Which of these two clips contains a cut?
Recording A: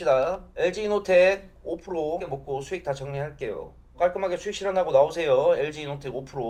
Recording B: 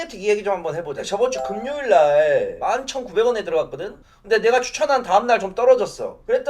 B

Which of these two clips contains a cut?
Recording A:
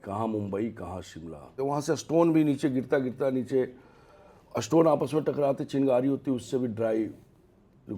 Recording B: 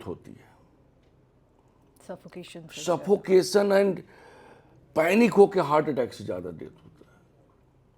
A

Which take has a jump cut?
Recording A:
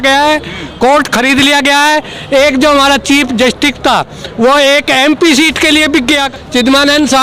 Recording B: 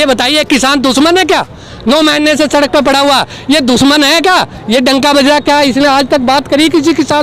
A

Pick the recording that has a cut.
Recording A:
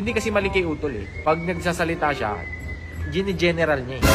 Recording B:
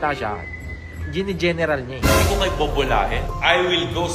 A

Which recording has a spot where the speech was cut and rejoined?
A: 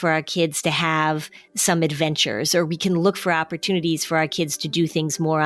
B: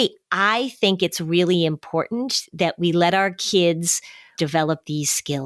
B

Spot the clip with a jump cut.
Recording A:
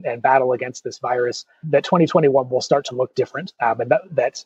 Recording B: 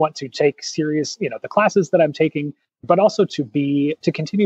B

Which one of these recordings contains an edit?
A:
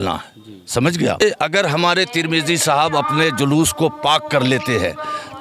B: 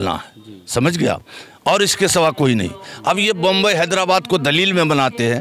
A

